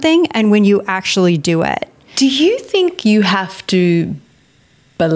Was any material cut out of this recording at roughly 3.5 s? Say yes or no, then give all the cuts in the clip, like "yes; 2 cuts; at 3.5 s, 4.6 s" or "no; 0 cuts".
no; 1 cut; at 2.0 s